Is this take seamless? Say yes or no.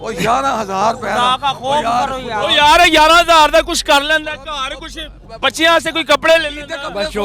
yes